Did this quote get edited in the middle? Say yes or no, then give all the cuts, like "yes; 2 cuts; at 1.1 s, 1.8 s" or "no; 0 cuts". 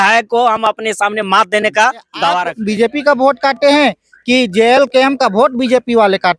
yes; 1 cut; at 2.5 s